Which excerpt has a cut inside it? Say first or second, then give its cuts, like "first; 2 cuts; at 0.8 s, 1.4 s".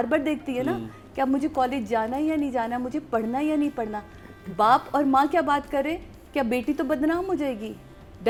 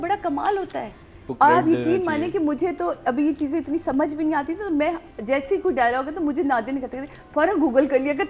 second; 1 cut; at 1.3 s